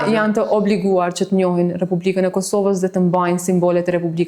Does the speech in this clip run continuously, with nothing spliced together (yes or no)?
yes